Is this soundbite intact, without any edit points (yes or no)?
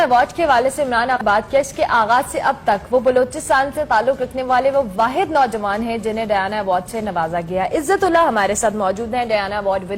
no